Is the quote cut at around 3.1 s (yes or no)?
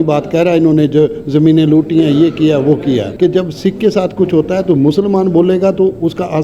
yes